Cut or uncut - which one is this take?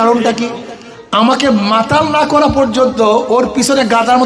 uncut